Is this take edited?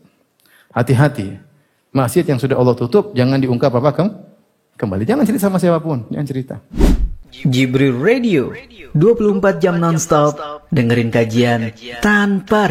yes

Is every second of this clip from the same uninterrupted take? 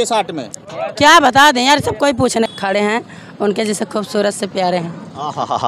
no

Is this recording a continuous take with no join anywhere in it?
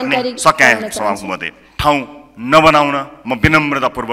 no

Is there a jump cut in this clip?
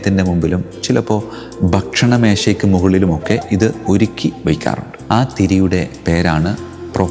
yes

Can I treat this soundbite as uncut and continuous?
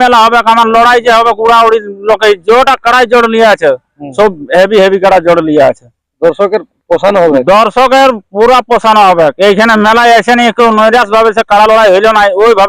yes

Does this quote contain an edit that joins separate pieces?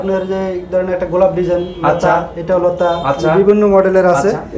no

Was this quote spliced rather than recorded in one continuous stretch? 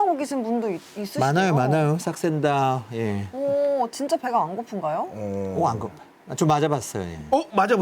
no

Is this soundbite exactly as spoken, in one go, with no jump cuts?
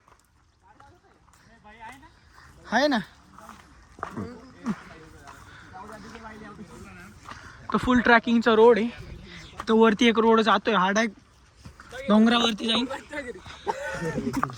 yes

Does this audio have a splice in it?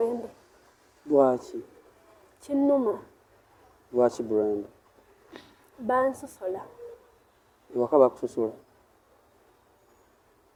no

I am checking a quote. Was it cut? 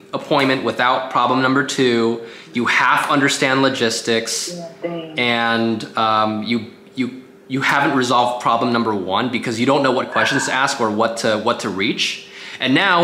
no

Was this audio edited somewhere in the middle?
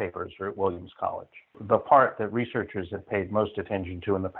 yes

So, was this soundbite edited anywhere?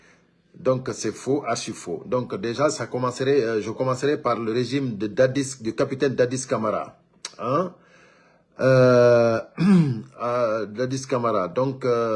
no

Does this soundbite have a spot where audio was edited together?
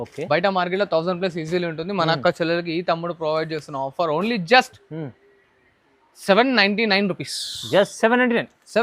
no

